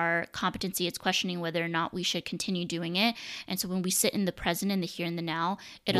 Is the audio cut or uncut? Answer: uncut